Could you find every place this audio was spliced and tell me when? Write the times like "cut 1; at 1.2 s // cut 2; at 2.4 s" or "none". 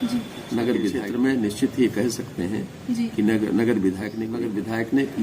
cut 1; at 1.0 s // cut 2; at 4.2 s